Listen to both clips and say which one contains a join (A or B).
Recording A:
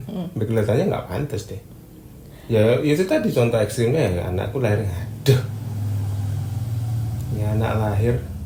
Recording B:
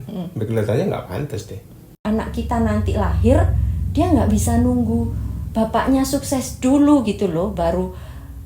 B